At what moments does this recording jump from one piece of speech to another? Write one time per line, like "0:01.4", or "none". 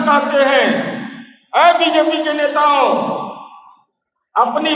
none